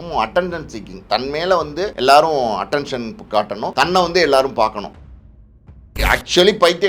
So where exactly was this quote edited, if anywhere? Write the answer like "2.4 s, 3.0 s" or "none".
1.9 s, 3.7 s, 5.4 s